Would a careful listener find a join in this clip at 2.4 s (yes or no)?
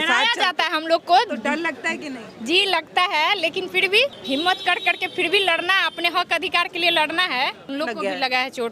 no